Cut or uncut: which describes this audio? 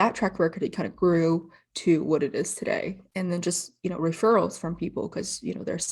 cut